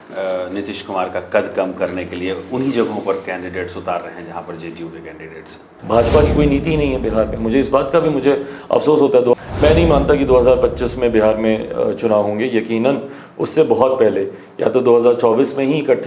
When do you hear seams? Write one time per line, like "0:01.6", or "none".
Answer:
0:05.7
0:09.3